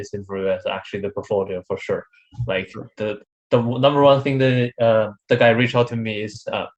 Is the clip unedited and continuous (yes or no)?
yes